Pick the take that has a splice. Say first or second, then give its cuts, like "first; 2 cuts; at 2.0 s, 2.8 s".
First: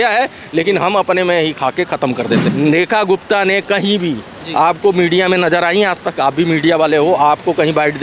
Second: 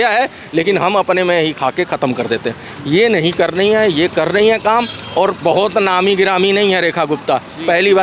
first; 1 cut; at 2.5 s